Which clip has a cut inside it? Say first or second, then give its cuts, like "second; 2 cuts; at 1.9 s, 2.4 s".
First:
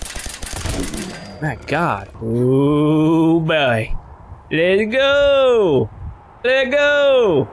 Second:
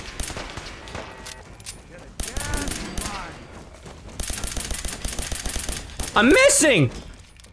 first; 1 cut; at 2.1 s